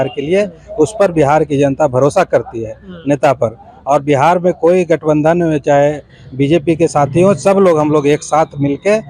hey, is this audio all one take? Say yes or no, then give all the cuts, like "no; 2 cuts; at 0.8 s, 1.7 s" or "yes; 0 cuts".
yes; 0 cuts